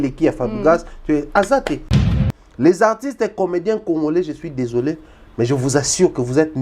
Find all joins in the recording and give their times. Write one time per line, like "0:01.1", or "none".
0:02.1